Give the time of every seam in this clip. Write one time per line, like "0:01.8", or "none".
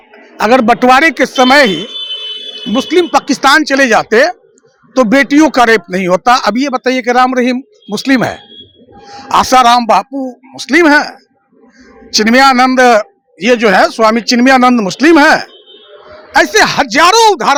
none